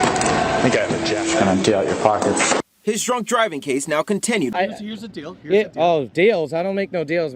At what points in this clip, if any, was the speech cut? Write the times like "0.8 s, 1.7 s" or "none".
4.5 s